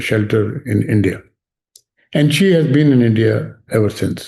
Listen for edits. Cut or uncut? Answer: uncut